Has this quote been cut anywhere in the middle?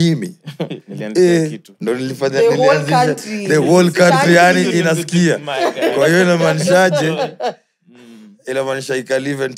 no; 0 cuts

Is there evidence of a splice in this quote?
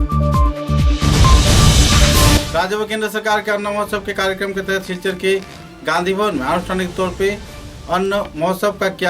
yes; 1 cut; at 2.4 s

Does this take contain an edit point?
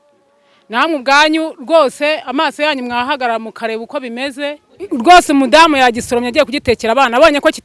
yes; 1 cut; at 4.7 s

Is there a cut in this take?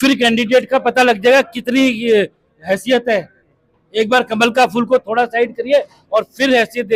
no; 0 cuts

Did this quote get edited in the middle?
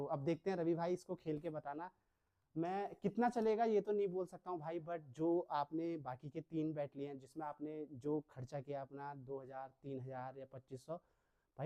no; 0 cuts

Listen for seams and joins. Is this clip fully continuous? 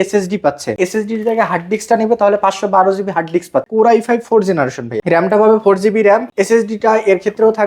no; 4 cuts; at 0.8 s, 3.7 s, 4.9 s, 6.3 s

